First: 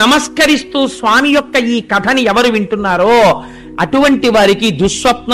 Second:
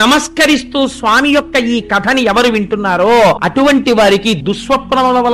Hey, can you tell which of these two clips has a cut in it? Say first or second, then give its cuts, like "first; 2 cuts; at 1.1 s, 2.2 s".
second; 2 cuts; at 3.4 s, 4.4 s